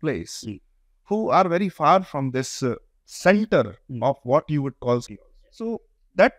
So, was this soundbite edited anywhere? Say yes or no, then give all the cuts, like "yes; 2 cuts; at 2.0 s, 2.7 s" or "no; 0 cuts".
yes; 1 cut; at 5.0 s